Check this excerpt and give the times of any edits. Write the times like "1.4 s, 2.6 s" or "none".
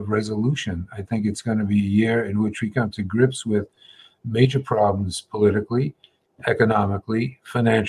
none